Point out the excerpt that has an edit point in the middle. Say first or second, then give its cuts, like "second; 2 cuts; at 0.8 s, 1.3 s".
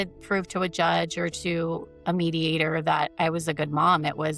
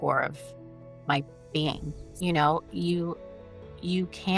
second; 1 cut; at 2.0 s